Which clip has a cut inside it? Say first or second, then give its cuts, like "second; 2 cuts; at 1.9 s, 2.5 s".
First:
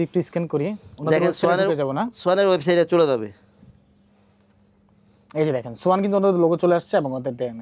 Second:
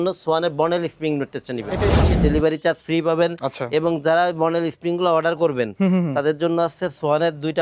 second; 1 cut; at 1.9 s